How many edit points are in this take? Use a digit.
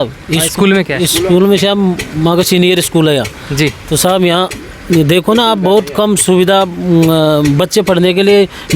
0